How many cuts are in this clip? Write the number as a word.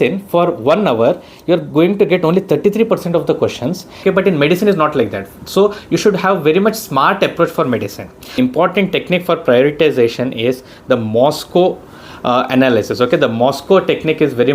two